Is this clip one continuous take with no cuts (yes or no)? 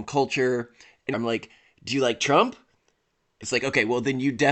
no